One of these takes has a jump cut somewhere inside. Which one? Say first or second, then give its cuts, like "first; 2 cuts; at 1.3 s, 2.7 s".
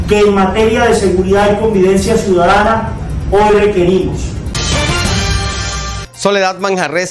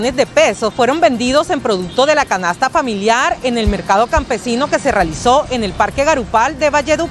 first; 2 cuts; at 4.6 s, 6.0 s